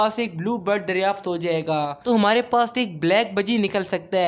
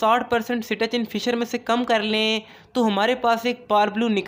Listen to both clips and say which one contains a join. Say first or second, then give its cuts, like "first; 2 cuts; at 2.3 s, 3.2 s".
first; 1 cut; at 2.0 s